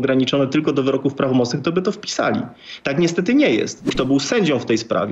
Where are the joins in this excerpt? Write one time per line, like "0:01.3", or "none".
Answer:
0:03.8